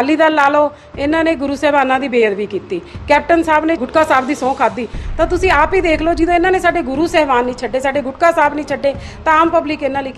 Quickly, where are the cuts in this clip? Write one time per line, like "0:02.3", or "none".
0:03.8